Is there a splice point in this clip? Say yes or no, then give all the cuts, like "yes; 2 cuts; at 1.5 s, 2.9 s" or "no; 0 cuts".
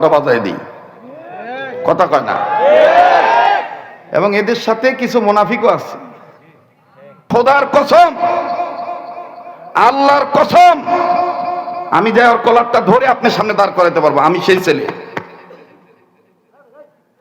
yes; 1 cut; at 7.3 s